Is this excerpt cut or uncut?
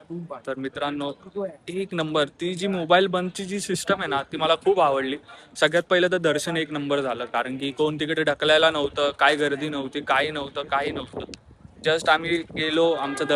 uncut